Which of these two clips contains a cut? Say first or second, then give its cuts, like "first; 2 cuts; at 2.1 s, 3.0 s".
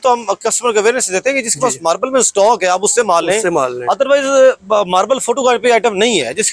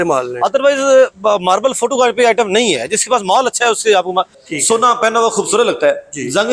second; 1 cut; at 4.4 s